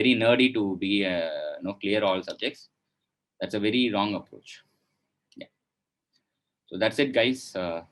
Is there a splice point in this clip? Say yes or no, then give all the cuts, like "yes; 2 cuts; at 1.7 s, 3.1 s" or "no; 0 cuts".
no; 0 cuts